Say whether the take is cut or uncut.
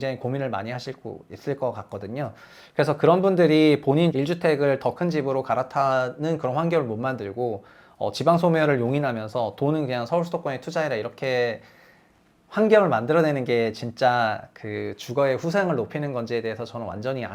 uncut